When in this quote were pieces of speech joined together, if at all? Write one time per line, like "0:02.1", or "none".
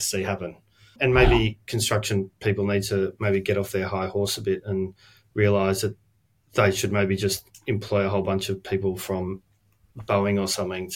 0:00.9